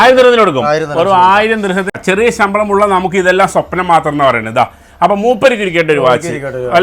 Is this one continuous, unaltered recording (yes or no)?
no